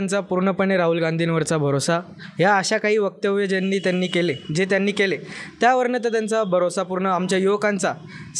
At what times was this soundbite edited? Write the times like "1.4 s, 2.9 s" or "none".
none